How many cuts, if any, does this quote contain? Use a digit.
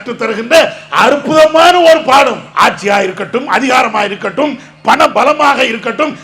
1